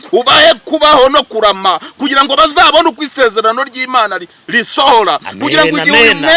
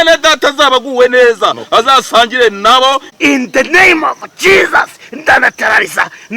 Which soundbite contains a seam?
second; 1 cut; at 3.1 s

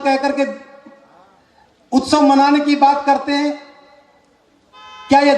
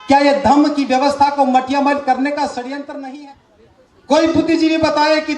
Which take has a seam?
second; 1 cut; at 3.1 s

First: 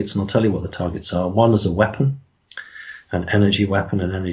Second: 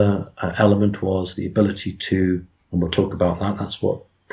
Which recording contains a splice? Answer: second; 1 cut; at 2.3 s

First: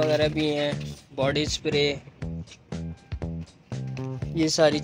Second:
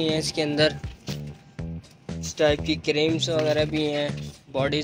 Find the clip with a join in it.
second; 2 cuts; at 0.8 s, 2.3 s

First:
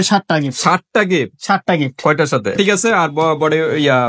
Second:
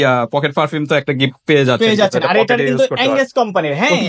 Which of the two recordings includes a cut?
first; 1 cut; at 2.8 s

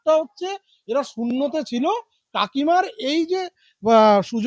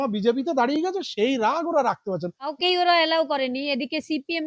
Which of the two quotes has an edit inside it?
second; 1 cut; at 2.5 s

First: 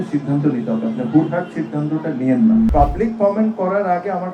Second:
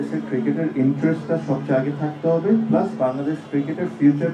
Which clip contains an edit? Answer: first; 1 cut; at 2.7 s

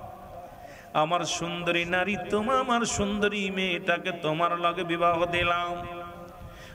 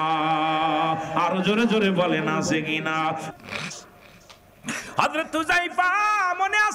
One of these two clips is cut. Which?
second; 1 cut; at 3.3 s

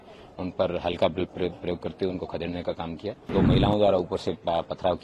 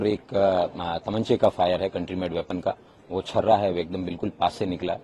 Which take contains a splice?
first; 1 cut; at 3.3 s

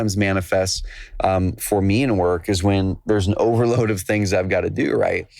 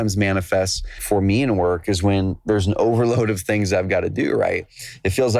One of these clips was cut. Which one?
second; 1 cut; at 1.0 s

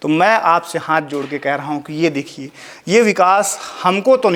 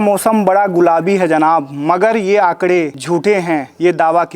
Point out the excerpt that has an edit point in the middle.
second; 1 cut; at 3.0 s

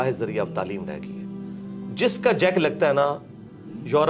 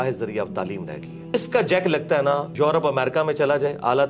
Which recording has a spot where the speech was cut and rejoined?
second; 2 cuts; at 1.3 s, 2.5 s

